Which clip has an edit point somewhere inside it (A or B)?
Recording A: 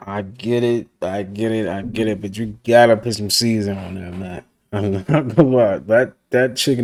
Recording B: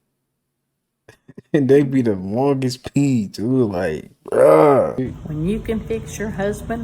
B